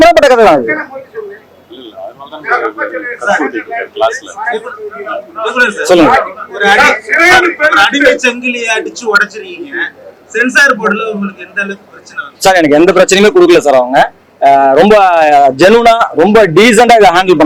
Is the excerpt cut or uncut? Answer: uncut